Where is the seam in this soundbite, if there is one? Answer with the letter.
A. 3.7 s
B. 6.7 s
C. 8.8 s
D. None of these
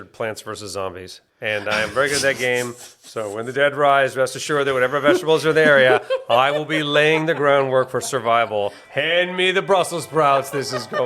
C